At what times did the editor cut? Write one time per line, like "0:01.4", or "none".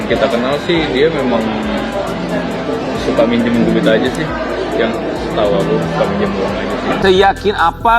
0:07.0